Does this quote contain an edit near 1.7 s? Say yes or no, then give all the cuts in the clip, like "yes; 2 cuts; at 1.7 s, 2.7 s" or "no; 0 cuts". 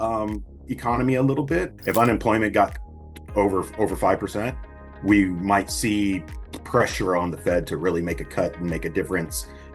yes; 1 cut; at 1.7 s